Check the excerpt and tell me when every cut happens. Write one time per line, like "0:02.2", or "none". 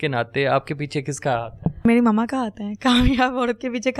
0:01.8